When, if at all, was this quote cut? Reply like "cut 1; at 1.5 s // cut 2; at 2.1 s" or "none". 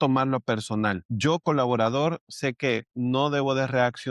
cut 1; at 1.1 s

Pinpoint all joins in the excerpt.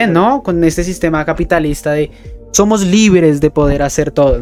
none

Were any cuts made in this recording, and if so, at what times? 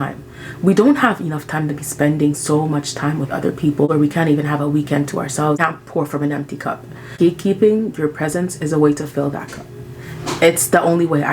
cut 1; at 3.9 s // cut 2; at 5.6 s

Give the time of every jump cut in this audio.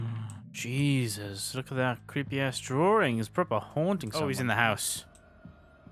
cut 1; at 4.1 s

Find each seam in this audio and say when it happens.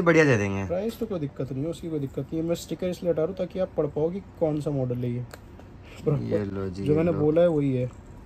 none

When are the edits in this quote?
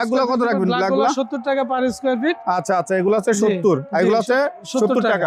none

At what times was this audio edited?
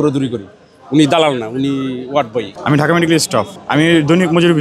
cut 1; at 2.5 s // cut 2; at 3.6 s

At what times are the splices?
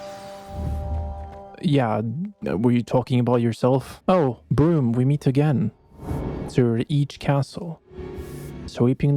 cut 1; at 3.9 s

